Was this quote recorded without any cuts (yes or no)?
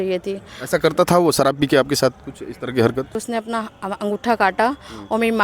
no